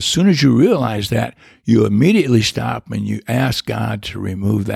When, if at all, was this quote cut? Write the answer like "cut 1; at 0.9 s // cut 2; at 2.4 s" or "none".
none